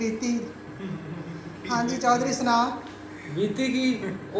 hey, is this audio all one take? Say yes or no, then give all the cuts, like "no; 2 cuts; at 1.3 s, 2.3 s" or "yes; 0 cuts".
yes; 0 cuts